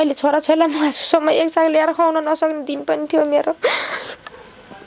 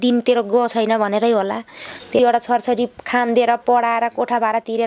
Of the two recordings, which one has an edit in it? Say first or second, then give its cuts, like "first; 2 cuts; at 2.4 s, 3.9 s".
second; 1 cut; at 2.2 s